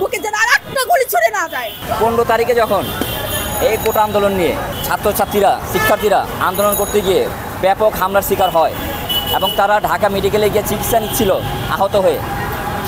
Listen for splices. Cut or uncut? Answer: uncut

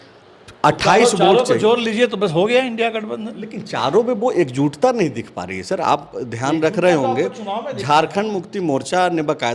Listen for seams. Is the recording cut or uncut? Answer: uncut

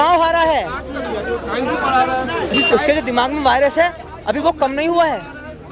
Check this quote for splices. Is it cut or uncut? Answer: uncut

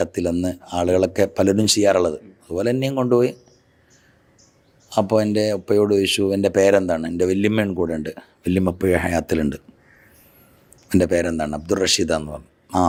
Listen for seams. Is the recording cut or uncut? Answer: uncut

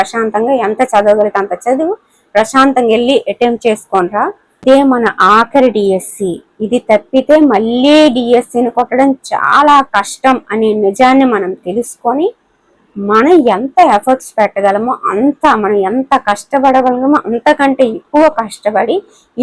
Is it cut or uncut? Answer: cut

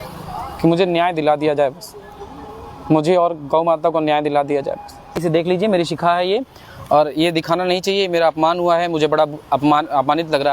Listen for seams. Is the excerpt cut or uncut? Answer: cut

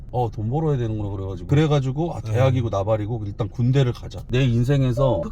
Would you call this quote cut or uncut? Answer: cut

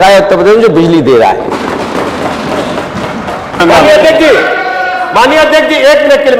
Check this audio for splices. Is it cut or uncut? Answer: cut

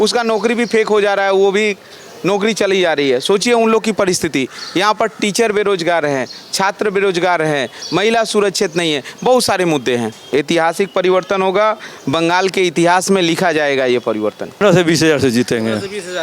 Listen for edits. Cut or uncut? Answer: cut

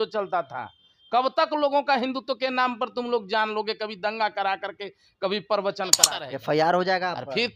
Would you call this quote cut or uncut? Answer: cut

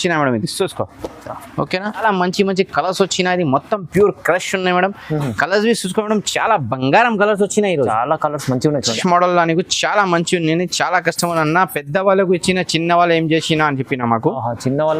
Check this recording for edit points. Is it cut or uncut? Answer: cut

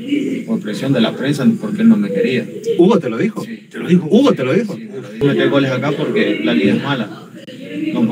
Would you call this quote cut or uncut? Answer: cut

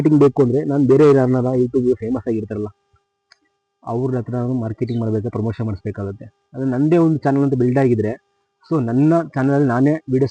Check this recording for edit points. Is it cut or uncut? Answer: uncut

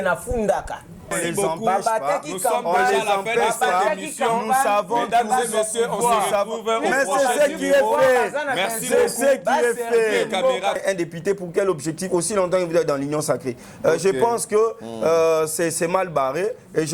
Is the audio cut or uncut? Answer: cut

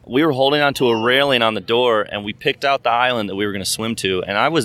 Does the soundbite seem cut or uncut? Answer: uncut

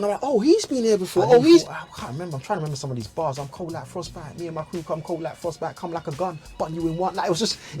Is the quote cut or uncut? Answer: cut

